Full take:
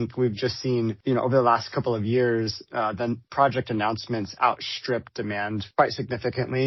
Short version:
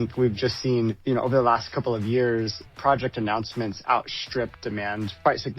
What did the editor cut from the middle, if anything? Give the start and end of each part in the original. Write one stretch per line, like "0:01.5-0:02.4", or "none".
0:02.7-0:03.2